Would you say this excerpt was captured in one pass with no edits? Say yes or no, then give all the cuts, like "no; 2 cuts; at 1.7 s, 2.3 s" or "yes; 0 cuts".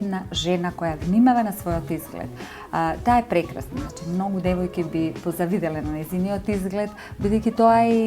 yes; 0 cuts